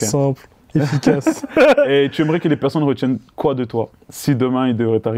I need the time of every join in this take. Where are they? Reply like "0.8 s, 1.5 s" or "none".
none